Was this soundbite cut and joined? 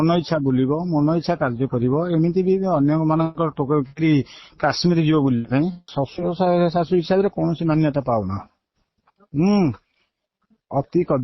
yes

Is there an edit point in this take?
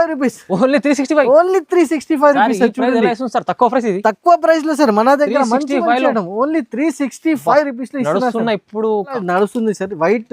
yes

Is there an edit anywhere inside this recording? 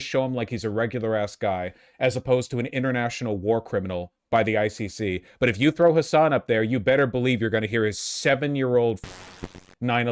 no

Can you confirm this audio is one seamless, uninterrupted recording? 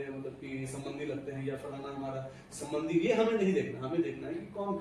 yes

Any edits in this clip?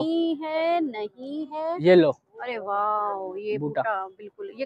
no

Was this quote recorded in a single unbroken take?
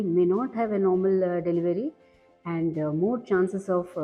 yes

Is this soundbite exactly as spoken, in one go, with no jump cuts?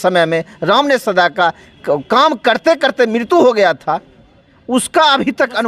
yes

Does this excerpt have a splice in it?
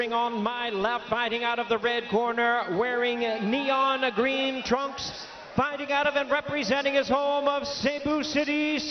no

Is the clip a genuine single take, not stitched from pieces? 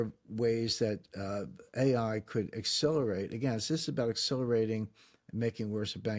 yes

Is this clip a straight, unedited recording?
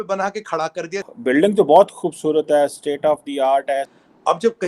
no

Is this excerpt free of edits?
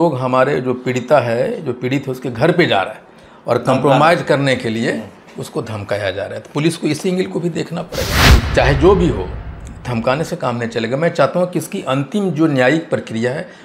no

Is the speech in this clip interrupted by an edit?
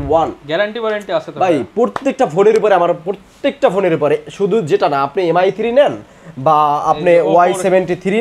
no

